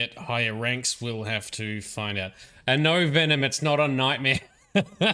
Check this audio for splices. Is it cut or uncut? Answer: uncut